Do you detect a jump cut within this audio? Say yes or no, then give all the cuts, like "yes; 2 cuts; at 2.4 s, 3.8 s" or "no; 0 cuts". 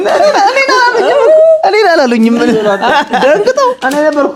no; 0 cuts